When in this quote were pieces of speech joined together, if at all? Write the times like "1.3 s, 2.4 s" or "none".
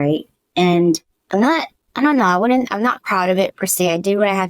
1.1 s